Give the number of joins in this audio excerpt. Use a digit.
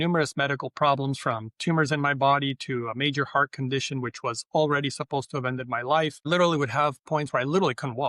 1